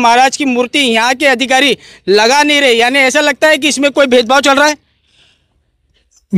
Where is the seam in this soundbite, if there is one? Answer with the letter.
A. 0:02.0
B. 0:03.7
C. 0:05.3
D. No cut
D